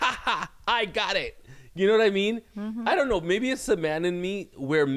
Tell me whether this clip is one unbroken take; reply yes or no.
yes